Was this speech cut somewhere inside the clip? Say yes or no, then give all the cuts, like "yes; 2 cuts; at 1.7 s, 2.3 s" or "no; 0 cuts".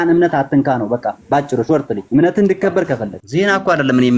yes; 2 cuts; at 2.0 s, 3.2 s